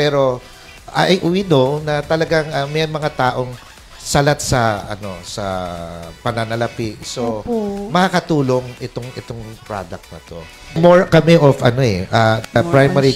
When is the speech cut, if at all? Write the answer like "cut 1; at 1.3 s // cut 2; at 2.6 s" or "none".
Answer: cut 1; at 10.8 s